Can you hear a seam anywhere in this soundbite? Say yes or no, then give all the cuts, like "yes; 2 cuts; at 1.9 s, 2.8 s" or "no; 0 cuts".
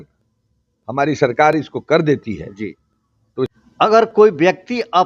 yes; 1 cut; at 3.5 s